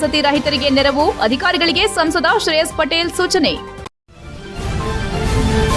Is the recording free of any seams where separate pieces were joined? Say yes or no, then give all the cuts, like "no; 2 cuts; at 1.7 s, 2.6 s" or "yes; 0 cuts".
no; 1 cut; at 3.7 s